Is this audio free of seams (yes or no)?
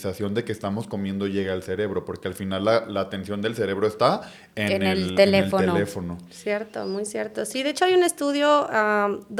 yes